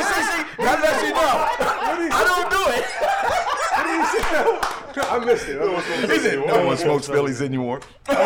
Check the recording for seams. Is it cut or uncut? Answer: uncut